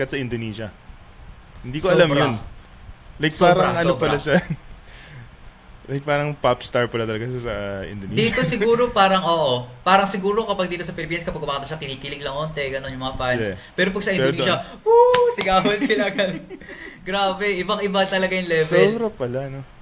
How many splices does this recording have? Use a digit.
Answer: 0